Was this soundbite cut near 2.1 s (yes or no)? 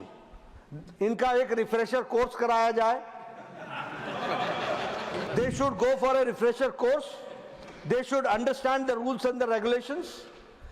no